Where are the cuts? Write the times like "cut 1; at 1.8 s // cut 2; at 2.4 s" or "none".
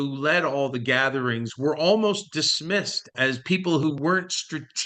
cut 1; at 3.2 s